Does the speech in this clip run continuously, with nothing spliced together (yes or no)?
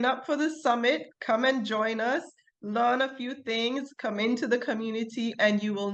yes